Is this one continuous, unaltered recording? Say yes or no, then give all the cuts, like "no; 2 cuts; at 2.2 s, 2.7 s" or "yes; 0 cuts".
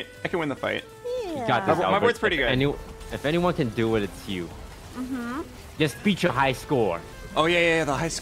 no; 3 cuts; at 0.9 s, 5.6 s, 7.1 s